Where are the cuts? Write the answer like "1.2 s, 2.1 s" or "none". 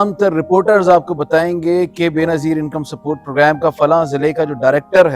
none